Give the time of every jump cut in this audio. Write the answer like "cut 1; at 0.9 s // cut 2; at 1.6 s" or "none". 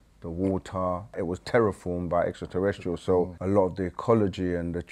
cut 1; at 1.2 s // cut 2; at 3.4 s

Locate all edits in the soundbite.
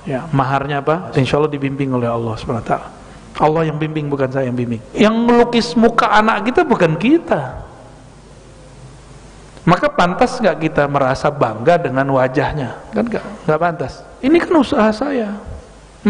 cut 1; at 1.1 s // cut 2; at 4.8 s // cut 3; at 14.3 s

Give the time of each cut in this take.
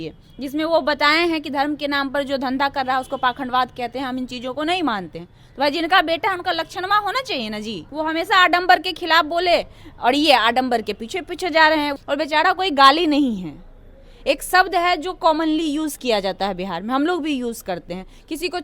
cut 1; at 7.8 s // cut 2; at 11.9 s

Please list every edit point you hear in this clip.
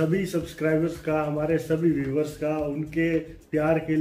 none

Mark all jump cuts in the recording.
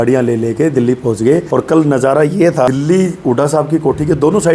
cut 1; at 1.5 s // cut 2; at 2.7 s

